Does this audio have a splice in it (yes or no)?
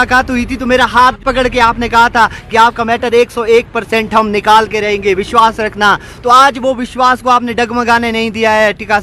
yes